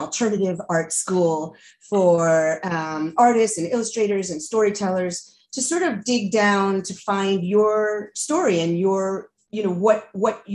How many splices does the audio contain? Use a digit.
0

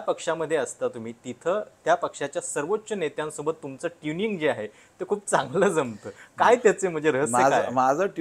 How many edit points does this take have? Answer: 0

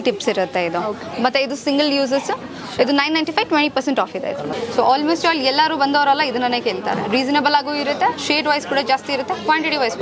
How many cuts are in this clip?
2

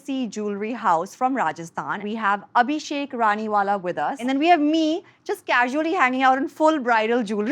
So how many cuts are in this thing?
2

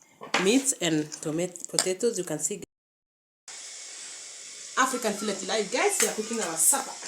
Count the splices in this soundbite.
1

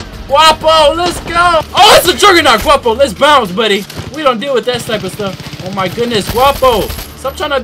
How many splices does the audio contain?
1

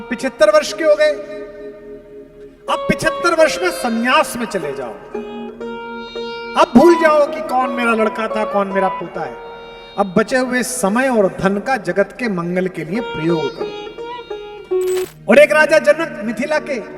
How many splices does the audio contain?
1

